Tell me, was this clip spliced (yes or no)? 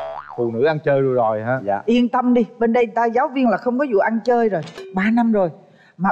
yes